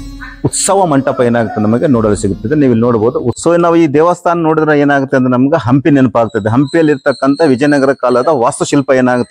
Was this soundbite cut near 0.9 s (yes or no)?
no